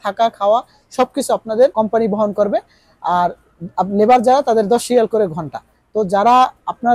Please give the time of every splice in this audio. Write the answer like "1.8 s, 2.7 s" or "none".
1.7 s